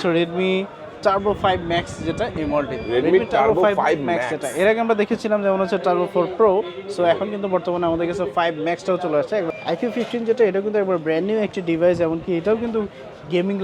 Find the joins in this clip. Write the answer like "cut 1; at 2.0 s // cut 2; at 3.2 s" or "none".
cut 1; at 9.5 s